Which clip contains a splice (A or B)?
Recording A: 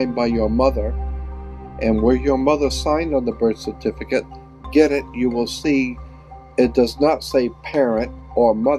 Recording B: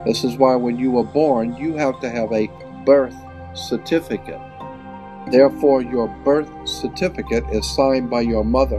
B